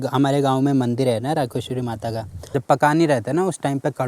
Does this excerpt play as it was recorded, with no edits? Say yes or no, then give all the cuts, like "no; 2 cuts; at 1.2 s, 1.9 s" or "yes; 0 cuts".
no; 1 cut; at 2.3 s